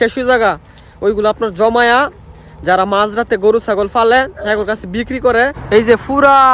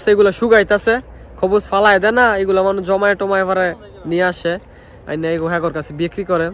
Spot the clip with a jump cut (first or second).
first